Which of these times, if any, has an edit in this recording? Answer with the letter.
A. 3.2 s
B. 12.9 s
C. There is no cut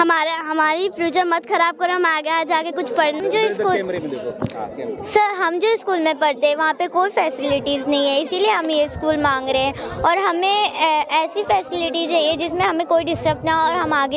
A